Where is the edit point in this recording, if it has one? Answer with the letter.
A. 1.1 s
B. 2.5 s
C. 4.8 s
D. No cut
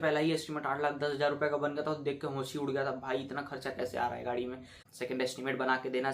C